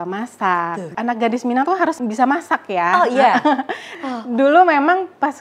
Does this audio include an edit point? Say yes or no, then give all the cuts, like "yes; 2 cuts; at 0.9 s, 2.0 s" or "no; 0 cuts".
yes; 3 cuts; at 0.9 s, 2.0 s, 4.0 s